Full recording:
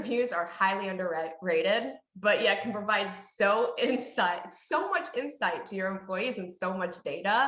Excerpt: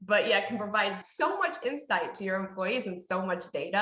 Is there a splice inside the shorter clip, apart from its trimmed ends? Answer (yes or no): yes